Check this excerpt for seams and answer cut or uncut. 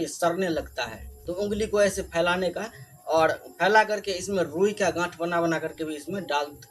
uncut